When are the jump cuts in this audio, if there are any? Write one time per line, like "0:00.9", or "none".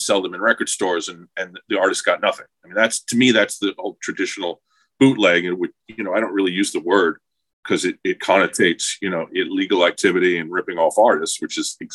none